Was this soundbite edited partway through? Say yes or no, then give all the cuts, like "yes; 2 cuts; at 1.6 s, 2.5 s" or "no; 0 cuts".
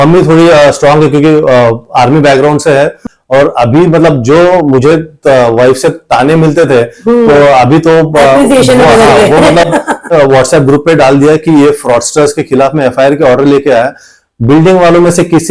yes; 2 cuts; at 3.0 s, 10.1 s